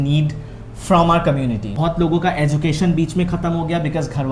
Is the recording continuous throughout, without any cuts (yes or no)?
no